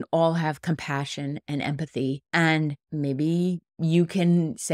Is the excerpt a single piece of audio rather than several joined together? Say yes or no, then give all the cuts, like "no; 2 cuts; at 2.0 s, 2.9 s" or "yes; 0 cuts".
no; 3 cuts; at 2.2 s, 2.8 s, 3.7 s